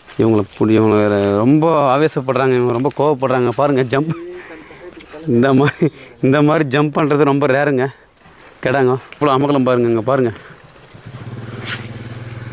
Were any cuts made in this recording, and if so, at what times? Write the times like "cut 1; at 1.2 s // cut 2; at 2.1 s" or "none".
cut 1; at 9.2 s

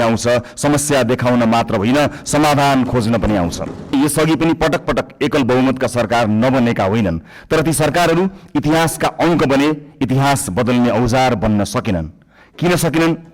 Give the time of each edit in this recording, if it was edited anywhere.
cut 1; at 3.9 s

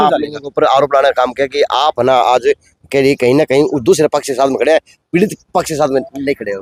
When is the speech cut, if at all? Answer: none

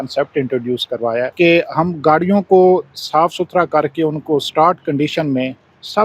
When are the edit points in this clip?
cut 1; at 1.3 s

